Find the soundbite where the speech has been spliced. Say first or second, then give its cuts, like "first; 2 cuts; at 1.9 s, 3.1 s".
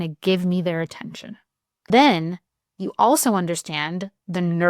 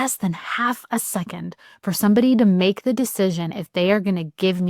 first; 1 cut; at 1.9 s